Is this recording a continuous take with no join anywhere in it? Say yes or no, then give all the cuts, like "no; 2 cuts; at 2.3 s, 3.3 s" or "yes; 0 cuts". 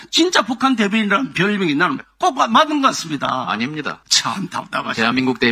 no; 1 cut; at 4.0 s